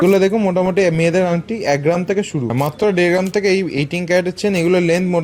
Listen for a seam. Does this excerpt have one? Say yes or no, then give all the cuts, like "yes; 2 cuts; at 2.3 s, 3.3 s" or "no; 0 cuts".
yes; 1 cut; at 2.5 s